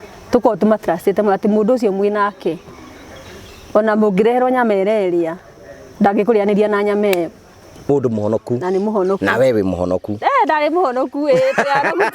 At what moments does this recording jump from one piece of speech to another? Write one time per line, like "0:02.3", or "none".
0:07.9

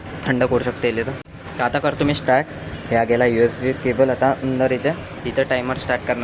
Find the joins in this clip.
0:01.3
0:05.1

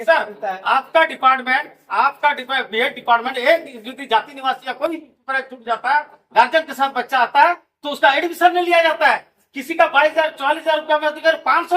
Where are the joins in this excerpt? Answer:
none

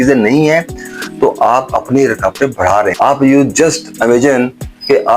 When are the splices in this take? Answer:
0:02.9

